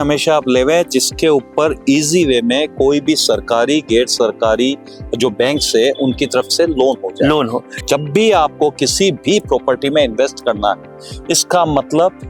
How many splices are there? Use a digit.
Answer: 1